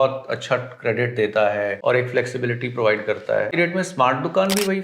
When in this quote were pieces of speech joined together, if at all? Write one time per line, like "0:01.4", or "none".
0:01.8
0:03.5